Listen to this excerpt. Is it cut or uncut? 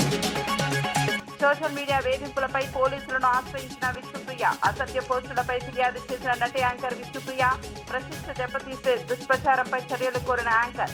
cut